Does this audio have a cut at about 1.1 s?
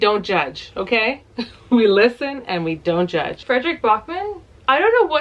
no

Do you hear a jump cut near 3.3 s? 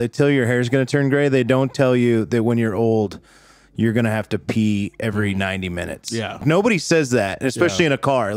no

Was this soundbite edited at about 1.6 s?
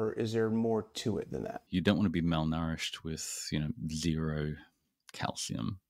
yes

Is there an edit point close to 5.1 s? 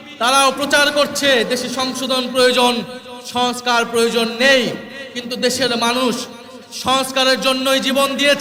no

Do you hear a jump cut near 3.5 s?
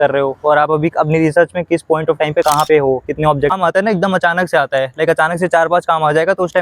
yes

